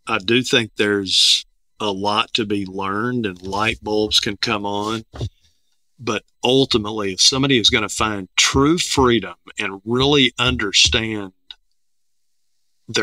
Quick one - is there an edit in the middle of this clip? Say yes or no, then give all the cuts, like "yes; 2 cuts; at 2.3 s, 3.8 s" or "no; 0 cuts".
no; 0 cuts